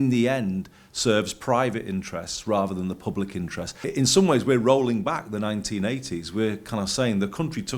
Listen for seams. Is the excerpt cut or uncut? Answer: cut